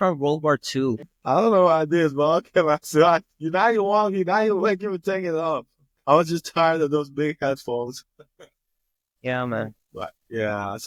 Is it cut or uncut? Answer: uncut